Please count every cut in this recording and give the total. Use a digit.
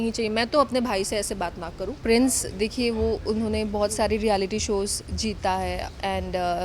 1